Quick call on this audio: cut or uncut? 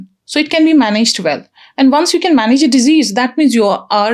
uncut